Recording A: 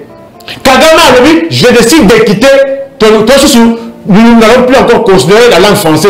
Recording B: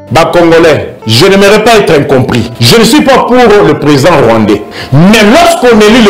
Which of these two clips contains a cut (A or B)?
B